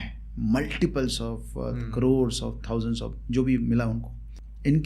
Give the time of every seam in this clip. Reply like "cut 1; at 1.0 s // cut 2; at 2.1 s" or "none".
none

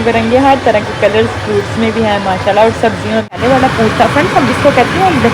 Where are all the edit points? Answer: cut 1; at 3.4 s

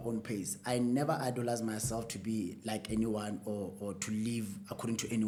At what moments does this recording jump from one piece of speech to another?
none

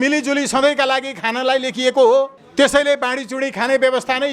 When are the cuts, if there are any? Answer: cut 1; at 2.4 s

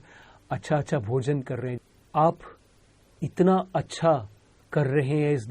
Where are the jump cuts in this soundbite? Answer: cut 1; at 1.8 s

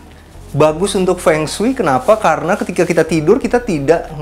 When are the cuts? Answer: none

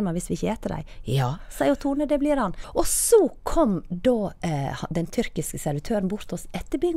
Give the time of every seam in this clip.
cut 1; at 2.6 s

